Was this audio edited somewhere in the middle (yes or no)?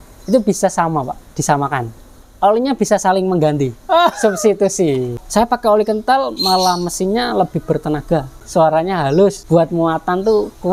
yes